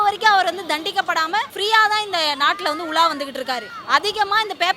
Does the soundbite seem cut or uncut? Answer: cut